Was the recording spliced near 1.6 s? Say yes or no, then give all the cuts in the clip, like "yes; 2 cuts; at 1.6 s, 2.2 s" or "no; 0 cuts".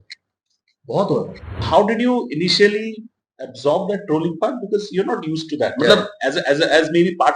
yes; 1 cut; at 1.6 s